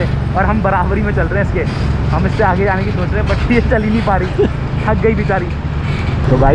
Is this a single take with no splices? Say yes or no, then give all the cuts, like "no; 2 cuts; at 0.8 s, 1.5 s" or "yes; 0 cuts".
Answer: yes; 0 cuts